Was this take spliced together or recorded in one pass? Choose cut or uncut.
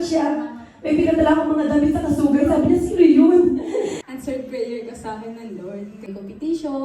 cut